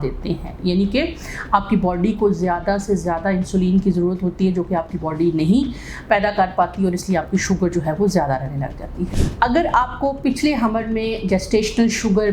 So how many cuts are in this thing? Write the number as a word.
one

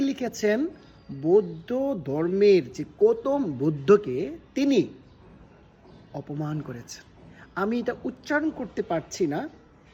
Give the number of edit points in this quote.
zero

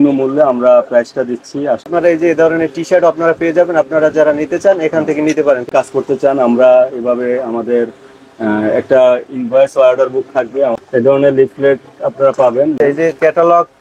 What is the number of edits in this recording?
four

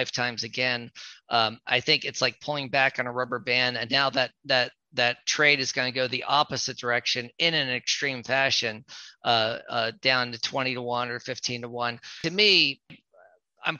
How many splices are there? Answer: two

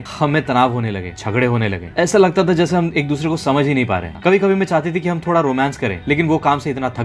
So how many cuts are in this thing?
zero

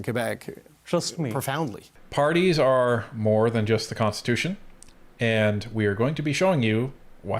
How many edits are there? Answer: one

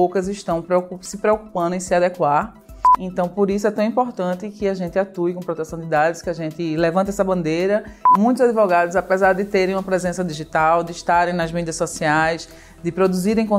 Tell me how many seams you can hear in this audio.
two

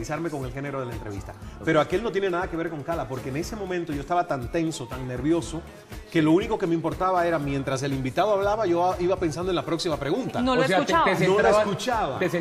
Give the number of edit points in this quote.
zero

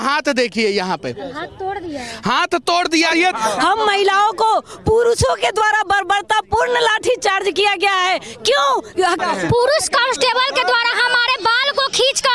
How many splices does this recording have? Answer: two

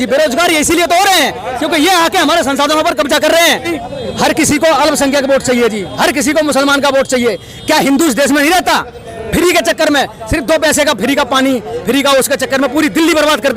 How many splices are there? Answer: two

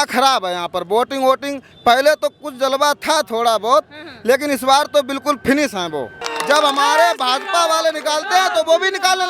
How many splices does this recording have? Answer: one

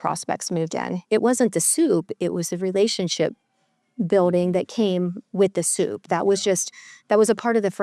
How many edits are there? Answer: one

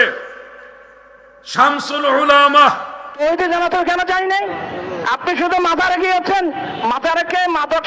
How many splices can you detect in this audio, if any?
one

